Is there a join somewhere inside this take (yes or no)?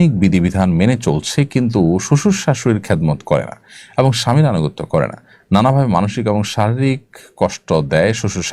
no